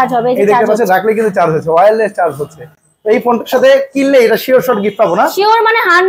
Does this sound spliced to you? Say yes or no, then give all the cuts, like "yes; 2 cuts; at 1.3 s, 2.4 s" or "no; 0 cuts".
no; 0 cuts